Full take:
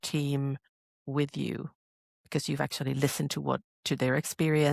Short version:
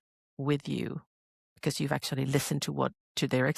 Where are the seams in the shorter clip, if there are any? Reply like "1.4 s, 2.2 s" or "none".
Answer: none